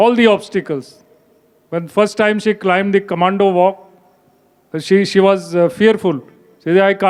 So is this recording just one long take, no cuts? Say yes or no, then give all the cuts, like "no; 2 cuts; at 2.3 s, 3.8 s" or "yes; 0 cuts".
yes; 0 cuts